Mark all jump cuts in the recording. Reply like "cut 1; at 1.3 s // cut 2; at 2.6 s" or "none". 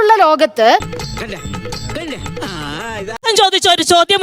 cut 1; at 0.8 s // cut 2; at 3.2 s